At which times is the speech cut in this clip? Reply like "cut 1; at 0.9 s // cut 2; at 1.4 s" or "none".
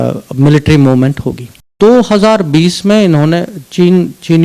cut 1; at 1.7 s